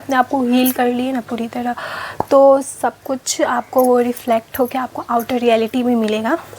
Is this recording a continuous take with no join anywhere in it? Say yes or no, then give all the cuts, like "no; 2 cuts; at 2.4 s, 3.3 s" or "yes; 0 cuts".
yes; 0 cuts